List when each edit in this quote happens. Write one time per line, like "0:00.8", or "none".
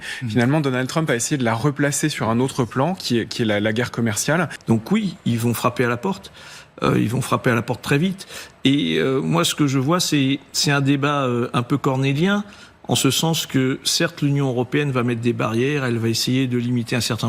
0:04.5